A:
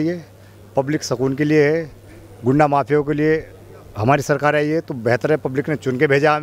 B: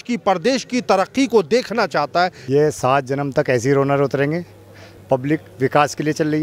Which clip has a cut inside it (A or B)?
B